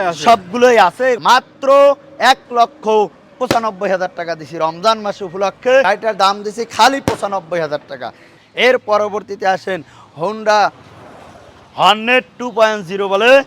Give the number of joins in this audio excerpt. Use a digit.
3